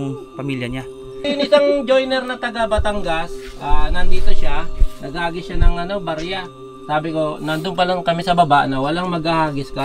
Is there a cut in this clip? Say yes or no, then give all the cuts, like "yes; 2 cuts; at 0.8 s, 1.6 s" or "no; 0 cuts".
yes; 1 cut; at 1.2 s